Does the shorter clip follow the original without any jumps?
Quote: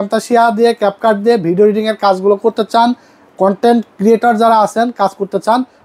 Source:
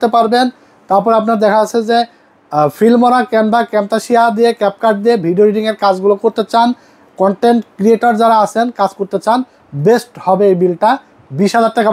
yes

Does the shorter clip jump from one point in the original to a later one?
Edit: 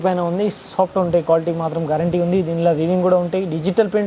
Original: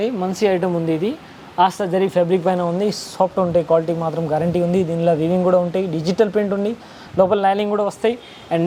no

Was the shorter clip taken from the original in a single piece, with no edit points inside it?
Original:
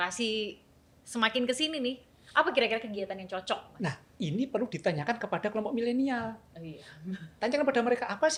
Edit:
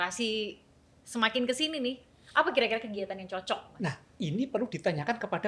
yes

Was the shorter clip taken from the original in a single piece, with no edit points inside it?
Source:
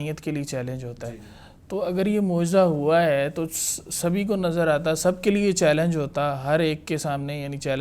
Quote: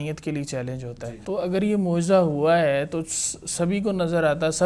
no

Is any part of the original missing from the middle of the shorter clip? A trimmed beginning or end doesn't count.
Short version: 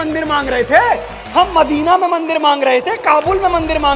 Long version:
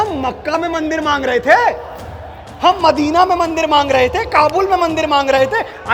yes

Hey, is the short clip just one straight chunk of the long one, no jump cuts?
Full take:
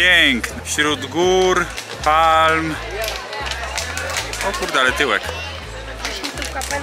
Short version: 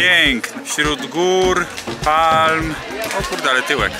no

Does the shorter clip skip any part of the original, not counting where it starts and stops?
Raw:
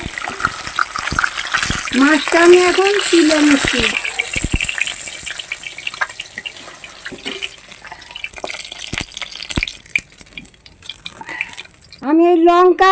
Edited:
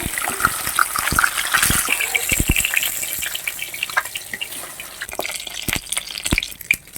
yes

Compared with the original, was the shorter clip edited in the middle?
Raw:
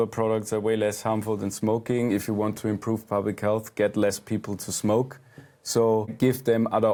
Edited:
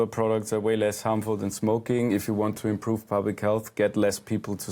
no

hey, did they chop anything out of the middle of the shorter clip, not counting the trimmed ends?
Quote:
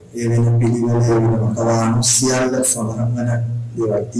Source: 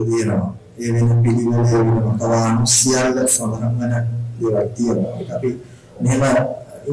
no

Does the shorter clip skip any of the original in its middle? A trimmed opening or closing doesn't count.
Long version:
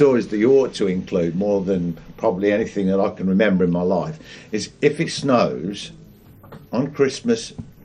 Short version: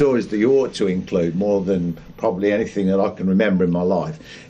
no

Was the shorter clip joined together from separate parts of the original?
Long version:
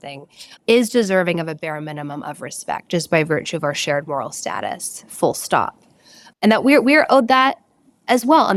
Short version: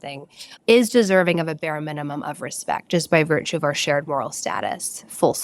no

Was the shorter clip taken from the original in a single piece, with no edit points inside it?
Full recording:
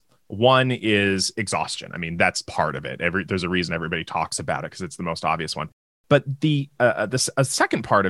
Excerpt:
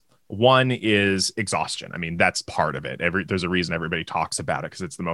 yes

